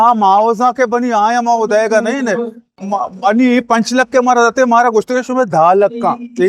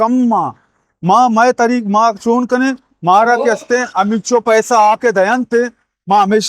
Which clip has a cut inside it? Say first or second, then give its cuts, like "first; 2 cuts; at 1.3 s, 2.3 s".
first; 1 cut; at 2.8 s